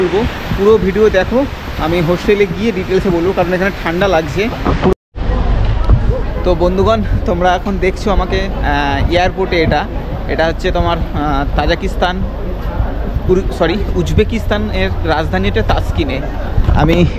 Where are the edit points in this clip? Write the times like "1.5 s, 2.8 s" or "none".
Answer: 4.9 s